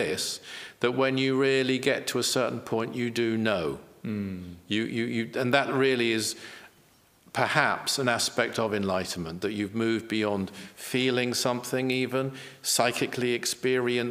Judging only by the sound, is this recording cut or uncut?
uncut